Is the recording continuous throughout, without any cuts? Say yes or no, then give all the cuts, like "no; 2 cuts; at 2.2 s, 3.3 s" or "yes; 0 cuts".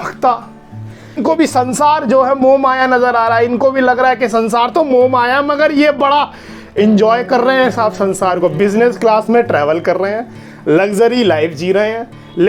no; 1 cut; at 1.2 s